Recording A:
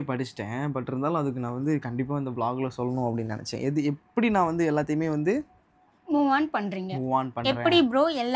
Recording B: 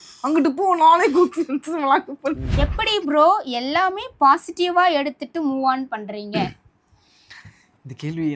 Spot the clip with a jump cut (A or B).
B